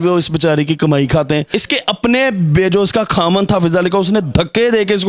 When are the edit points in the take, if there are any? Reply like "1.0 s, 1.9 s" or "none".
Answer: 1.5 s